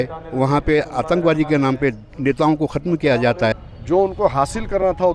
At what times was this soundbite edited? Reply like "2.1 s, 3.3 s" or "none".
3.5 s